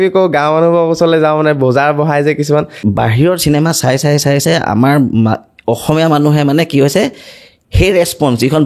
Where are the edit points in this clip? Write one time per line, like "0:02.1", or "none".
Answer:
0:02.7